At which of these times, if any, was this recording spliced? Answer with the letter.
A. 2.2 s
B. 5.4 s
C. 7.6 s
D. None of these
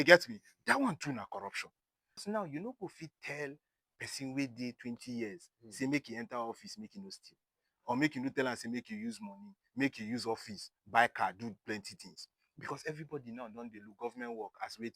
A